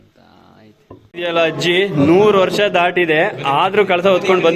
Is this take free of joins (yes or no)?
no